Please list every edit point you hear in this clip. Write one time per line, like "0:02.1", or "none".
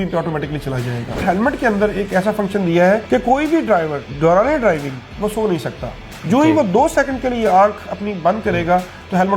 0:01.2
0:03.0
0:04.0